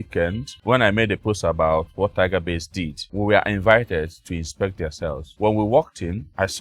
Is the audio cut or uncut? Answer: uncut